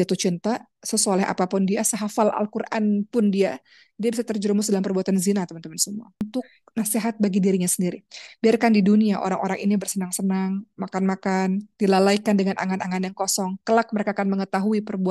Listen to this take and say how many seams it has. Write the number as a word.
one